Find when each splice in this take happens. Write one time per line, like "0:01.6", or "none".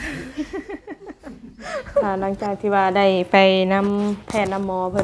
0:02.1

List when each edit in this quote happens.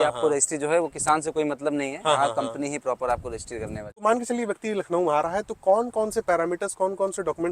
0:03.8

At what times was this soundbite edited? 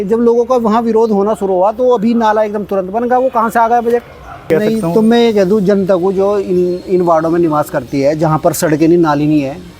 0:04.5

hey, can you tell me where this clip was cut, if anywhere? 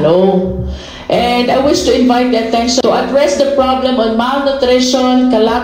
0:02.8

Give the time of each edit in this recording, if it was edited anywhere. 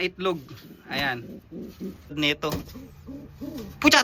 0:02.1

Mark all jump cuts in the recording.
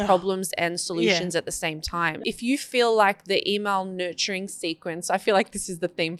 0:02.1

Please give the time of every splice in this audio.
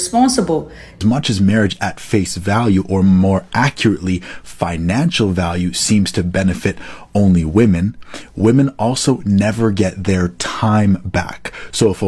0:01.0

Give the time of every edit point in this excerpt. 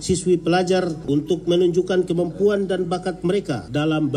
0:01.0

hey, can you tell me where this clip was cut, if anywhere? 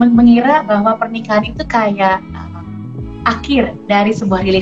none

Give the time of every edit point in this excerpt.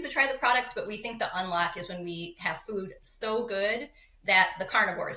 none

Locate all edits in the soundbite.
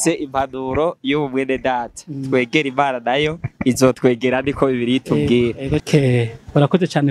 0:05.8

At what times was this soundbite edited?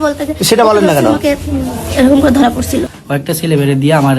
0:02.9

